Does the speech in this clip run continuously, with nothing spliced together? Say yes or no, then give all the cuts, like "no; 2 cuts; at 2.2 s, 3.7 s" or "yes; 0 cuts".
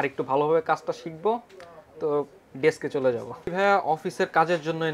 no; 1 cut; at 3.5 s